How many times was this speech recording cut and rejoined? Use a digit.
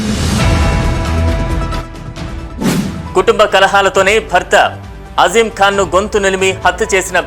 2